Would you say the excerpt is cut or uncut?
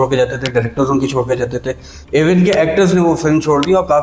cut